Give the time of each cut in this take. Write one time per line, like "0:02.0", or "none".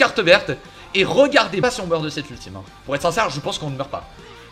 0:01.6